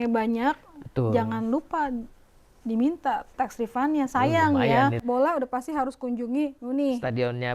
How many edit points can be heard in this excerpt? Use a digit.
1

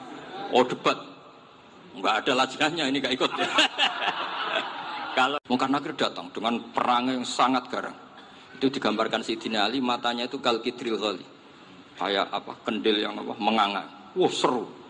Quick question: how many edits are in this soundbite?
1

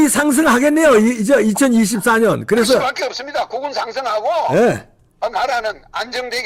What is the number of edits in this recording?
0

